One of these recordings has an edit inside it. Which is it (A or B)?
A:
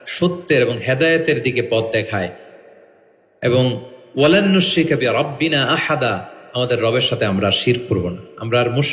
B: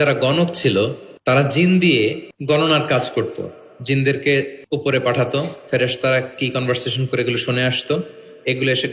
B